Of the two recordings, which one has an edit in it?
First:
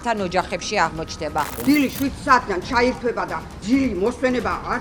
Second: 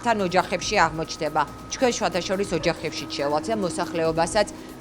first; 2 cuts; at 1.5 s, 3.5 s

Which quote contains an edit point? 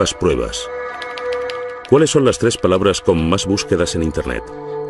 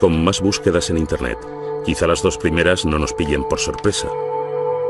first; 1 cut; at 1.4 s

